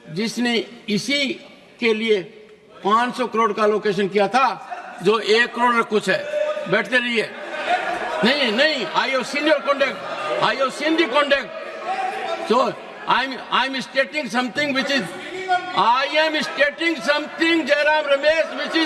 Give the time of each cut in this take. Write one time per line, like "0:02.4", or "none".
none